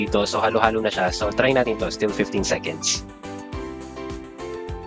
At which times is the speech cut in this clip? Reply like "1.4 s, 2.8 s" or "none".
none